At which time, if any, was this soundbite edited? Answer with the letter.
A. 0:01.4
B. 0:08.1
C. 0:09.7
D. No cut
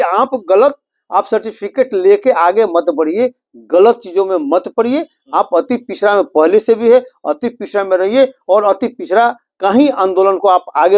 D